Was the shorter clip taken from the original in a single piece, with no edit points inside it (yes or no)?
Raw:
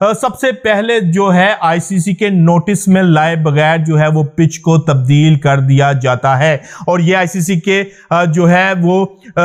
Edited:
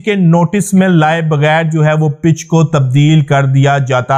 yes